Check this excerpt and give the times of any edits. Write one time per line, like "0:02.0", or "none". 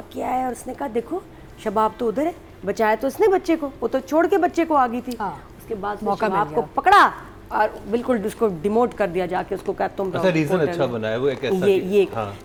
none